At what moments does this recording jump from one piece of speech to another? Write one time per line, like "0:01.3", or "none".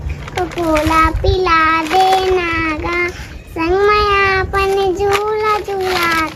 none